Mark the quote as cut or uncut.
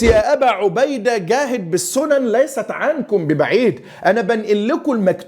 uncut